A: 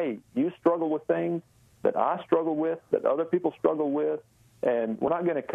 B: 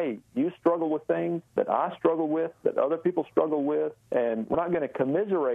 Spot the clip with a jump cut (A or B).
B